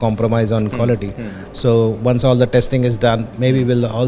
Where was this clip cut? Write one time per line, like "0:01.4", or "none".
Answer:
none